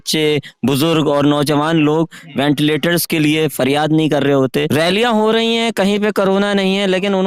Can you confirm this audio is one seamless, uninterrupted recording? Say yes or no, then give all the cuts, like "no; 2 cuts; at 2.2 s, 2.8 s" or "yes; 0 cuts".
no; 1 cut; at 4.7 s